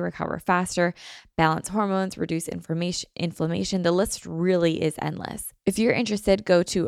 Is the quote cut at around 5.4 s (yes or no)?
yes